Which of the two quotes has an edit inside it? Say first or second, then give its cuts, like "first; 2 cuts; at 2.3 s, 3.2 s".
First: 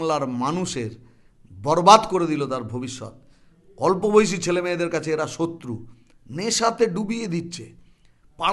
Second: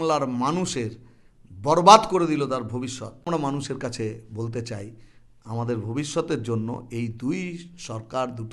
second; 1 cut; at 3.3 s